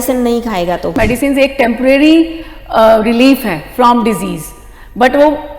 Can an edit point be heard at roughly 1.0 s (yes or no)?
yes